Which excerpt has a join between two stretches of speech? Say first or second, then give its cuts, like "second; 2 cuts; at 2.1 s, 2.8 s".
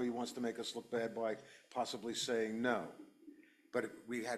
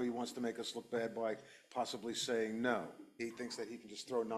second; 1 cut; at 3.0 s